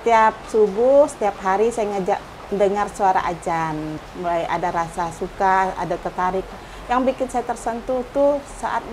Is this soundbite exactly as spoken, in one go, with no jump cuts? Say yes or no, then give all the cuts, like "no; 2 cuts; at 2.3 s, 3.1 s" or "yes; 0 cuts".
no; 1 cut; at 4.0 s